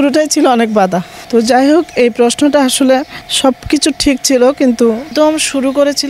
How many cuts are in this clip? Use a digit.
3